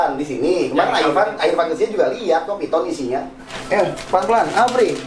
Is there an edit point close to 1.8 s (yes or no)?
no